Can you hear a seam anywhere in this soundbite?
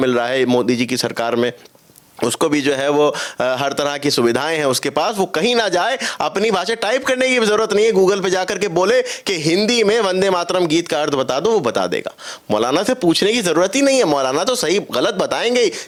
no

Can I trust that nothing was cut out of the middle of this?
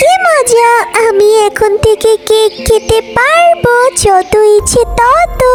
yes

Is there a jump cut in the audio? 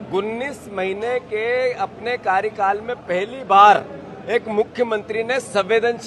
no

